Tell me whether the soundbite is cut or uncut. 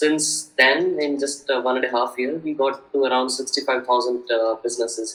uncut